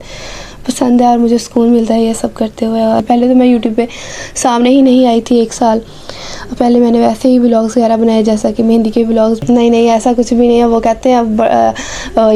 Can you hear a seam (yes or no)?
yes